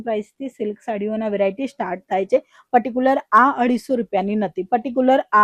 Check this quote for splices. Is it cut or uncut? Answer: uncut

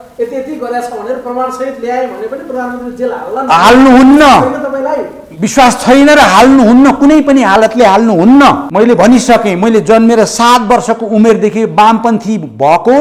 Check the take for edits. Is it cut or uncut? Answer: cut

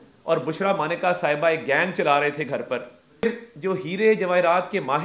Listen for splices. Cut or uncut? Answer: cut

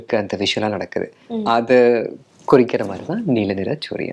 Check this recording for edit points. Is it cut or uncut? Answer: uncut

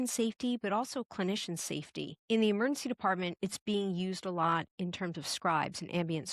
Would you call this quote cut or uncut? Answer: cut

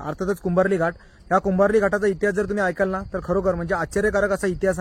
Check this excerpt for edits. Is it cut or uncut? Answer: uncut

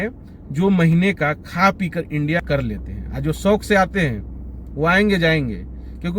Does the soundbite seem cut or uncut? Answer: cut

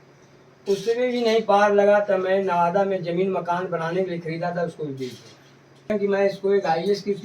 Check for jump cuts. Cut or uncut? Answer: cut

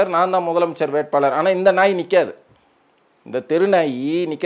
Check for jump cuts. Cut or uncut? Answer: uncut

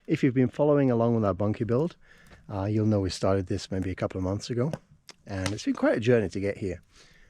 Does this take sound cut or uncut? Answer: uncut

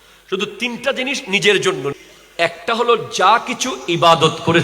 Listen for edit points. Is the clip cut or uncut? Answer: cut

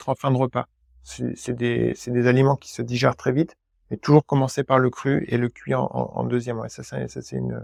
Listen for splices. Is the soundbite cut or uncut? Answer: uncut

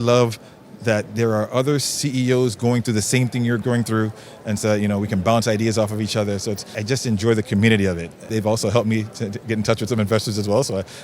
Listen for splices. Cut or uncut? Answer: cut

